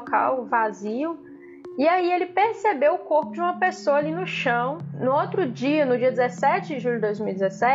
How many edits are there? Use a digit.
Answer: 1